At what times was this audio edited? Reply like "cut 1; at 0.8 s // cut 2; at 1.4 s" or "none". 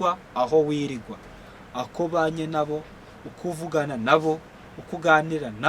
none